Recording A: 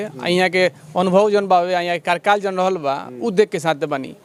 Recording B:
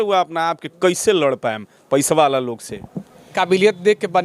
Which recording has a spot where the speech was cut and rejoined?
B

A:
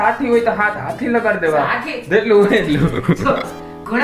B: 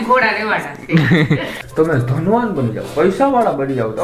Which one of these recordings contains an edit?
B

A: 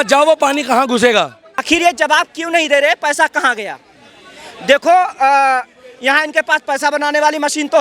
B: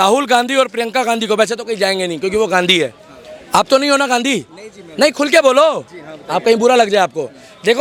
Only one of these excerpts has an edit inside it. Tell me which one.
A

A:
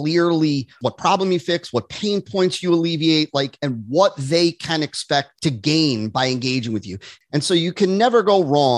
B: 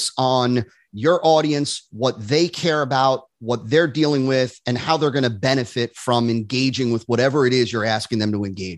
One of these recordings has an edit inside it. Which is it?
A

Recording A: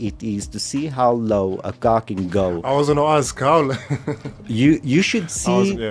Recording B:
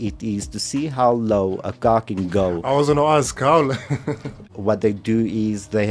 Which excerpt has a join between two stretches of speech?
B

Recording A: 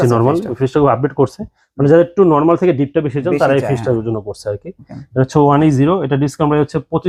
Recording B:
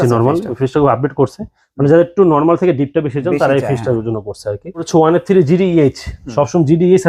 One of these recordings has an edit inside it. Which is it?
B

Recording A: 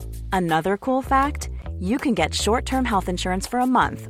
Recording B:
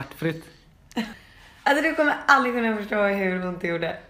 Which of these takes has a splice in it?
B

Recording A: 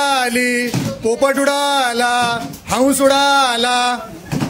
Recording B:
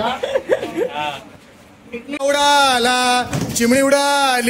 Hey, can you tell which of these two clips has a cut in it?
B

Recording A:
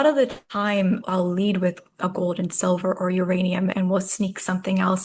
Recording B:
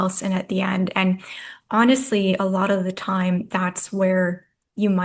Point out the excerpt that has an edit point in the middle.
A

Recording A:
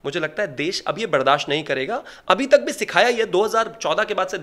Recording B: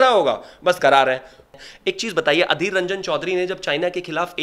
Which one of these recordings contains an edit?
B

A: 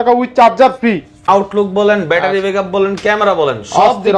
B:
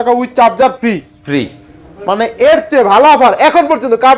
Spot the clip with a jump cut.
A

